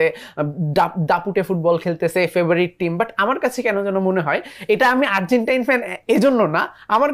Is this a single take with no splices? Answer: yes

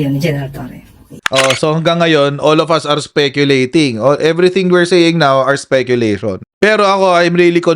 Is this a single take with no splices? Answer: no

